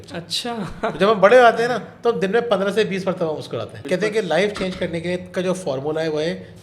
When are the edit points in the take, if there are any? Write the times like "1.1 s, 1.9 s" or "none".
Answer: 3.8 s